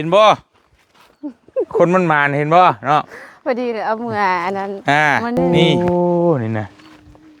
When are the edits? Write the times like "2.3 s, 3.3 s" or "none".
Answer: 5.4 s